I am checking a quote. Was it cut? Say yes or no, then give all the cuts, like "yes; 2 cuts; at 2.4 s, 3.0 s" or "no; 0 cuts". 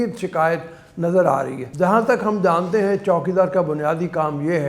yes; 1 cut; at 1.6 s